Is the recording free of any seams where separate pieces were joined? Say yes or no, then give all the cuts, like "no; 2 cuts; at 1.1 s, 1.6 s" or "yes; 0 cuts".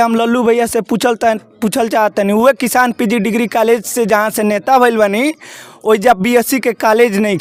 yes; 0 cuts